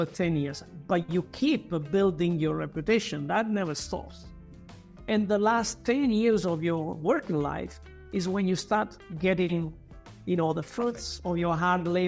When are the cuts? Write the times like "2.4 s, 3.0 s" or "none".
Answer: 9.0 s

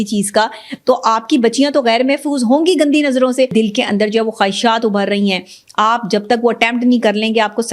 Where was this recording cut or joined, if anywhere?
3.5 s

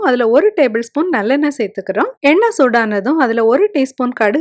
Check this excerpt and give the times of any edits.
none

